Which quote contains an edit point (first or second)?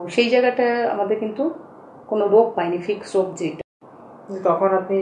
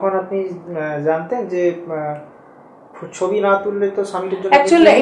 first